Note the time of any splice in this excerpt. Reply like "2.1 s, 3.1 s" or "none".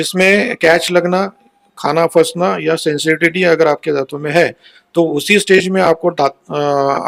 none